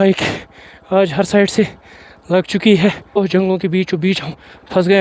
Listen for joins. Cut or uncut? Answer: cut